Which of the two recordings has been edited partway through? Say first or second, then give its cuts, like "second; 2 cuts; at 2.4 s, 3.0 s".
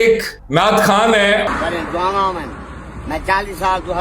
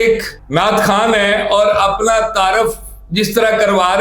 first; 1 cut; at 1.4 s